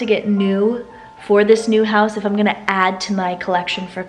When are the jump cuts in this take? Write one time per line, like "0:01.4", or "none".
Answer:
none